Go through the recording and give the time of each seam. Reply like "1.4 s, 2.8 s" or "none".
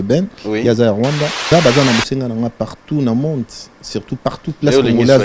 1.5 s